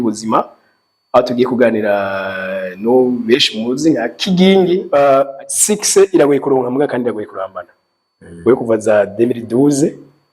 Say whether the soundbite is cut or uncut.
cut